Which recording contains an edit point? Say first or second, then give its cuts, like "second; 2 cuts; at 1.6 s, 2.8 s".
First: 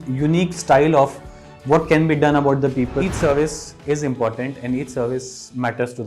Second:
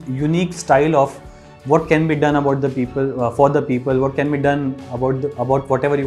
first; 1 cut; at 2.9 s